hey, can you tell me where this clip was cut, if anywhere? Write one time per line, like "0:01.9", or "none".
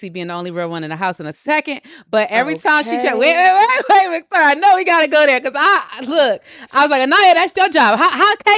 none